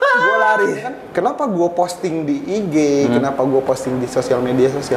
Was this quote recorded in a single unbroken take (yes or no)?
no